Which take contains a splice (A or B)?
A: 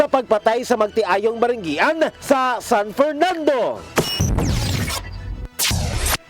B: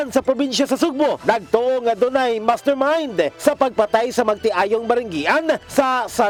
A